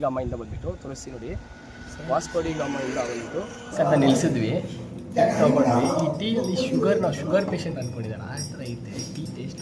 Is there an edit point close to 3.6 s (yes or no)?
yes